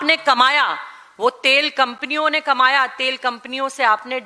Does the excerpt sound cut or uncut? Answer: uncut